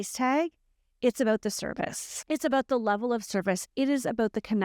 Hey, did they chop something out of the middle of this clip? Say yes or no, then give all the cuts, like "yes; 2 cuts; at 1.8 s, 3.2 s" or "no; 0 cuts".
yes; 1 cut; at 2.1 s